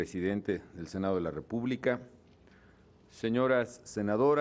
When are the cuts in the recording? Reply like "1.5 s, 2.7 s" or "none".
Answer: 1.9 s